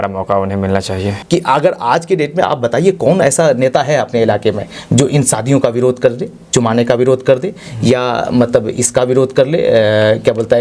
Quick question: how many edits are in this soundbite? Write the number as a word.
one